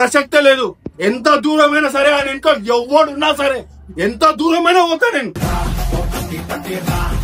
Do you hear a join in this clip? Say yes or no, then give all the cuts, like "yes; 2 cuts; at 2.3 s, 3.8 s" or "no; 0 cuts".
yes; 1 cut; at 5.4 s